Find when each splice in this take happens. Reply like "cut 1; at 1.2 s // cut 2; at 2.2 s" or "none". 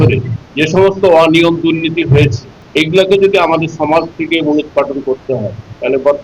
none